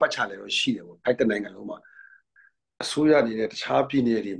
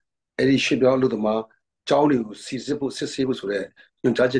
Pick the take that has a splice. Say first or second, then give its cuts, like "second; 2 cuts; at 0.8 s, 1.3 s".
first; 1 cut; at 2.2 s